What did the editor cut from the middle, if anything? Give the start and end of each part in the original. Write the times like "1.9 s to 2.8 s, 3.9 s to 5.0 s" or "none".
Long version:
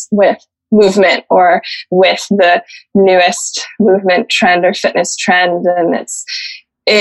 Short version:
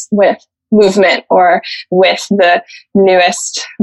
none